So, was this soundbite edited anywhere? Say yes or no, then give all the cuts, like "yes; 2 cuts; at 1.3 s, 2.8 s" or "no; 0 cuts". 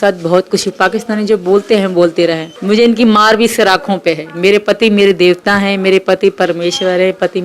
yes; 1 cut; at 2.5 s